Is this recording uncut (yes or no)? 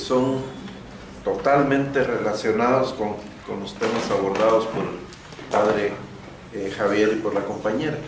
yes